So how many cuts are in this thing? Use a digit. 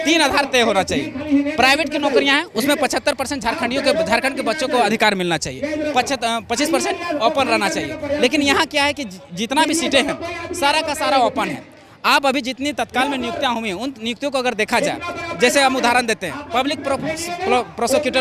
0